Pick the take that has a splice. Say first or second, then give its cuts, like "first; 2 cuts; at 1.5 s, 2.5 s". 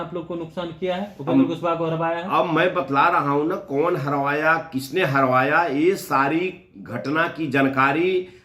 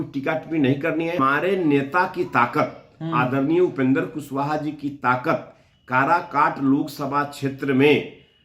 second; 1 cut; at 1.2 s